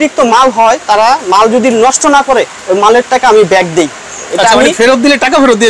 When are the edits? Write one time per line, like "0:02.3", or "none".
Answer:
none